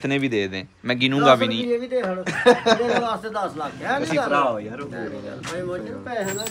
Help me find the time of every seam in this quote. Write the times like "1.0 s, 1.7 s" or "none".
none